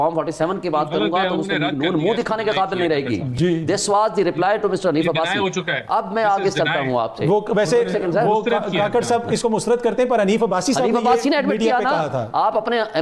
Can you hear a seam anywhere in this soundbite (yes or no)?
no